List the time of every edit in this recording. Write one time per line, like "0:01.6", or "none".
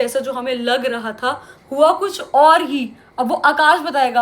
none

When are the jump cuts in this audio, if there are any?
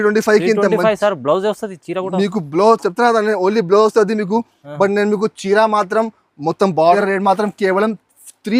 0:06.9

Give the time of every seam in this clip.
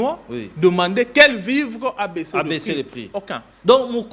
none

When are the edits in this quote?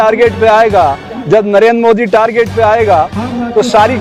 none

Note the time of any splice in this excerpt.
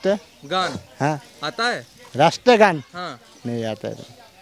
none

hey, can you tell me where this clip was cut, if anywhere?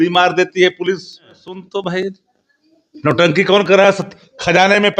0:01.5

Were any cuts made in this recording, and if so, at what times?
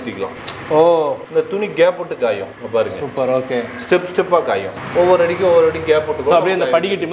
0:04.8

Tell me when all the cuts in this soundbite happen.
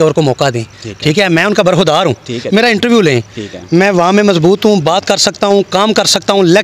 none

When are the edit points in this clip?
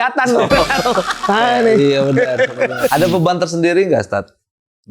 0:02.9

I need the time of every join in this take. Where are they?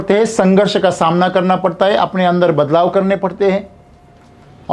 none

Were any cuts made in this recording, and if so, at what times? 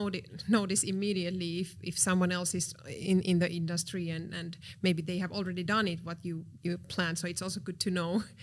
none

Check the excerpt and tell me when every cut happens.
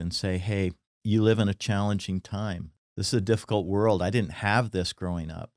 0:00.9
0:02.7

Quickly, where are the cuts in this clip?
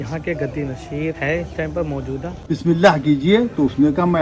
0:02.4

